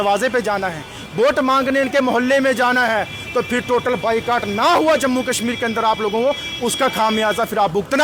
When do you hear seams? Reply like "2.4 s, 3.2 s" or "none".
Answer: none